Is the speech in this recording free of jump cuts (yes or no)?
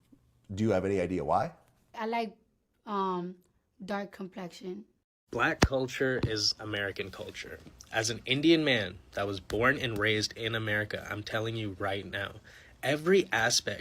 no